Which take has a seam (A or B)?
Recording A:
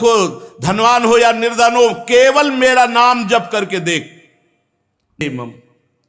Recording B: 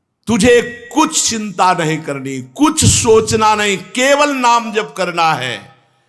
A